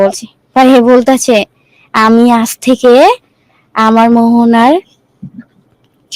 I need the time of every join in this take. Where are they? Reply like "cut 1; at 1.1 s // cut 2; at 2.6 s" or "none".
none